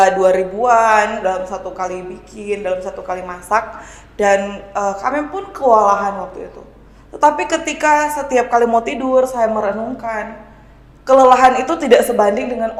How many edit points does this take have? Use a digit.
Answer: 0